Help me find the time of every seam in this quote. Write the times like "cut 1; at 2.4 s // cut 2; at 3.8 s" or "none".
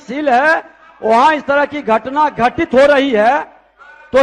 none